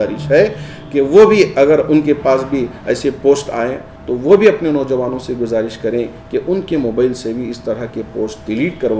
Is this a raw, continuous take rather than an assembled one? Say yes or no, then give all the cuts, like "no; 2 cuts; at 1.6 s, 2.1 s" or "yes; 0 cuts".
yes; 0 cuts